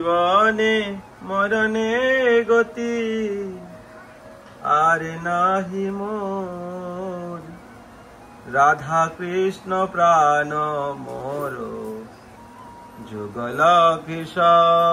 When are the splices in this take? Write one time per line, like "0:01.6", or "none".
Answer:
none